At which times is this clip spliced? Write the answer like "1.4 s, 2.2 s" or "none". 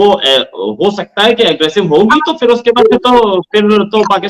none